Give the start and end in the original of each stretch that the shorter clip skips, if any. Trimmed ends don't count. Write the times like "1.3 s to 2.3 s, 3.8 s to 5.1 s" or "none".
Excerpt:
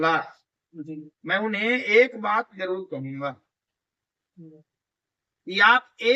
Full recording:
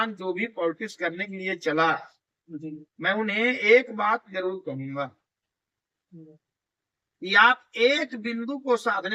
none